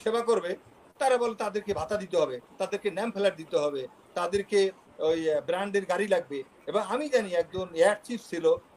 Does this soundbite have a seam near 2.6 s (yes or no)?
no